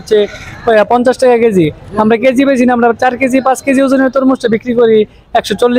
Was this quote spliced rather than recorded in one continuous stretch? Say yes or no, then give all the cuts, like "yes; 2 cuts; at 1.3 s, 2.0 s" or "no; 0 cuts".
no; 0 cuts